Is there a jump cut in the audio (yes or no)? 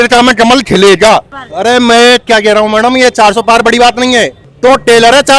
yes